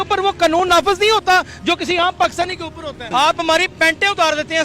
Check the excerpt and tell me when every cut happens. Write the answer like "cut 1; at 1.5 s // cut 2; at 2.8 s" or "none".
cut 1; at 3.1 s